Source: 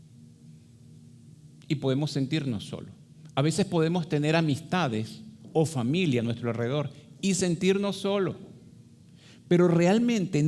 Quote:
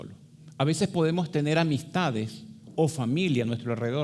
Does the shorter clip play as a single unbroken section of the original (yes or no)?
yes